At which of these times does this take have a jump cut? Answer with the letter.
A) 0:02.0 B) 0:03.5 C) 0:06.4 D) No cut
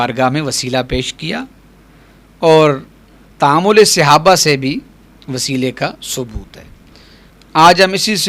D